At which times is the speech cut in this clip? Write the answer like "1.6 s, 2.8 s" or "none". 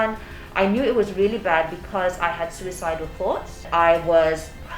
none